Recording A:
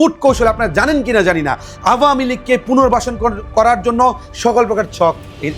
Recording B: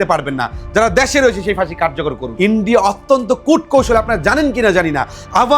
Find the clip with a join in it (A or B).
B